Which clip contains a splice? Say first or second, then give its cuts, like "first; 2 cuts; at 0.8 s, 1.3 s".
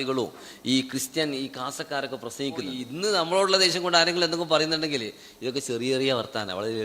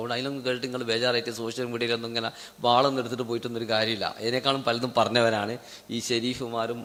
first; 1 cut; at 2.8 s